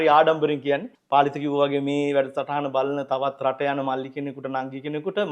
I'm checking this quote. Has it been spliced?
yes; 1 cut; at 0.9 s

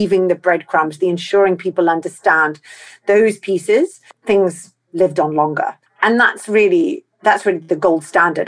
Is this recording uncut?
no; 2 cuts; at 4.1 s, 5.8 s

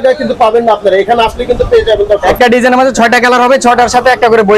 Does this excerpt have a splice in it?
yes; 1 cut; at 2.3 s

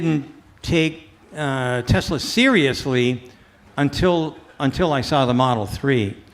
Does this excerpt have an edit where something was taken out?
no; 0 cuts

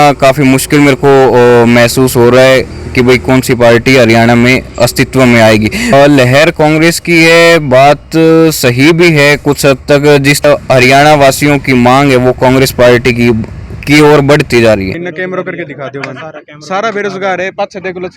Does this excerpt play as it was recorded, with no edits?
no; 3 cuts; at 5.8 s, 10.4 s, 14.9 s

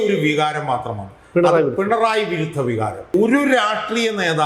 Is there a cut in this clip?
yes; 1 cut; at 3.1 s

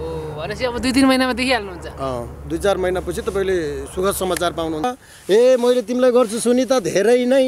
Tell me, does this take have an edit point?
yes; 1 cut; at 4.9 s

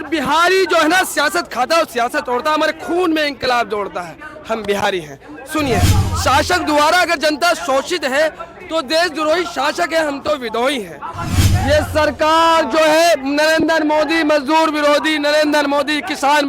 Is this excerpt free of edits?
no; 2 cuts; at 6.0 s, 11.3 s

